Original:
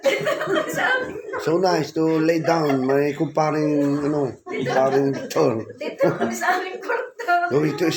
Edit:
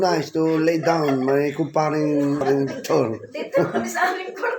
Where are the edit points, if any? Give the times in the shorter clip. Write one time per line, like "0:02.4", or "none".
0:02.4